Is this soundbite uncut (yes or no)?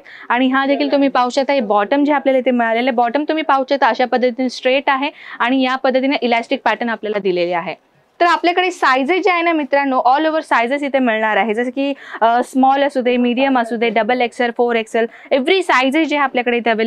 no